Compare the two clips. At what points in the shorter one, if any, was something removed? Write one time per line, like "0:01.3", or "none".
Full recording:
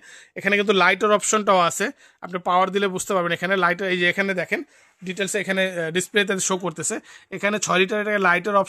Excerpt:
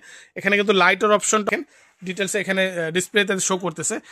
0:01.5

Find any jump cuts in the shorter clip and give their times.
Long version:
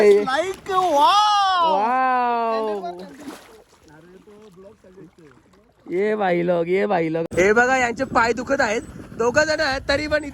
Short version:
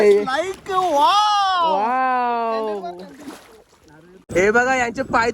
0:04.3

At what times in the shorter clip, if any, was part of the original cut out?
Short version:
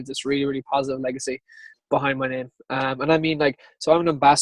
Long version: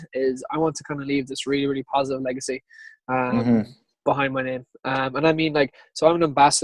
0:01.7

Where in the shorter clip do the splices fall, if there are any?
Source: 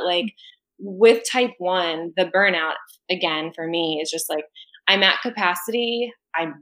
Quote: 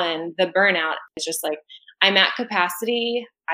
0:01.2

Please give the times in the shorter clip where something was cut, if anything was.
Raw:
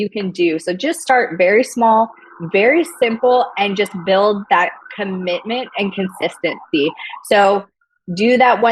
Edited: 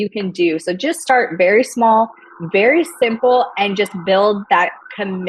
none

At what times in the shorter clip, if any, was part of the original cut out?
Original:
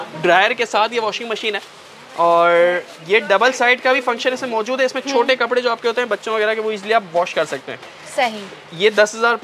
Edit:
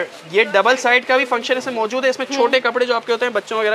none

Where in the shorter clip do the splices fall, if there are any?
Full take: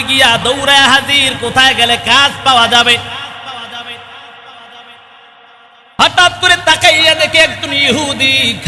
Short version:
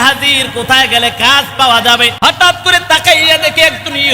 0:02.1

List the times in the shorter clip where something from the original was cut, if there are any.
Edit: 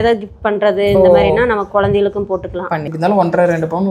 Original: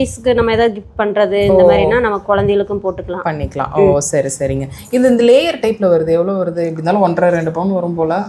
0:02.9

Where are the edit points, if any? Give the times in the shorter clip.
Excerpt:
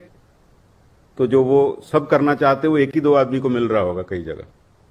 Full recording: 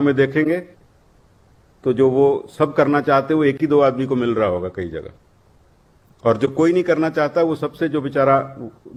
none

